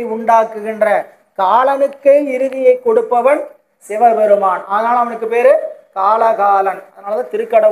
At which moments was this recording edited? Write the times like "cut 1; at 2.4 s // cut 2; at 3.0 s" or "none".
none